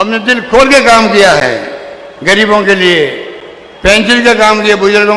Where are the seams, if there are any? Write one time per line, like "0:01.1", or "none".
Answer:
none